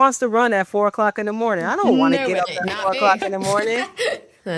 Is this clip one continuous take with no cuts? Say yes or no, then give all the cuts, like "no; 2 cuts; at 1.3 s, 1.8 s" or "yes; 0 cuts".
yes; 0 cuts